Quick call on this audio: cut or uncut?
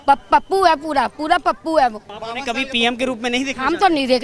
cut